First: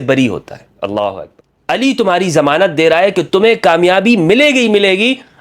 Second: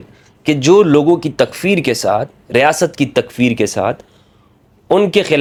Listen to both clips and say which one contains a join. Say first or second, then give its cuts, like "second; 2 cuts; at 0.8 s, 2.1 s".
first; 1 cut; at 1.3 s